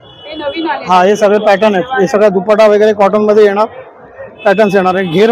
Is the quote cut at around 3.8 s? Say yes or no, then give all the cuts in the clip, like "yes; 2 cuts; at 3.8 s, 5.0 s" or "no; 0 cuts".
no; 0 cuts